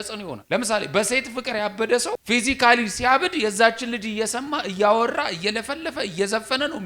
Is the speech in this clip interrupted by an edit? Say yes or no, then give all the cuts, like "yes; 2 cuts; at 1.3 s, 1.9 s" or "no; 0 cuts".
yes; 1 cut; at 2.2 s